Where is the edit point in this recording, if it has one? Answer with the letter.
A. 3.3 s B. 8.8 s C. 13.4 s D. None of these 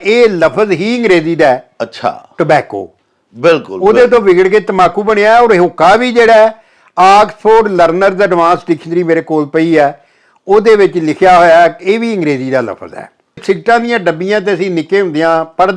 C